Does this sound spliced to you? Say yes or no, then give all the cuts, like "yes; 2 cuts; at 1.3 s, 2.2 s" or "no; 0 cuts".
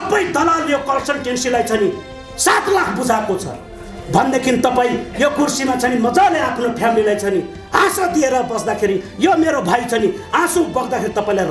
no; 0 cuts